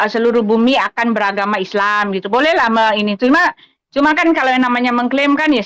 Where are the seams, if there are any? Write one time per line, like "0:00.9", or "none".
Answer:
none